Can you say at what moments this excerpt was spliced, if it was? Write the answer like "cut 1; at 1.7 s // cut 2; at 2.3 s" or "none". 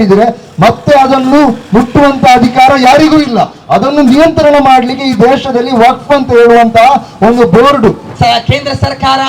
cut 1; at 8.1 s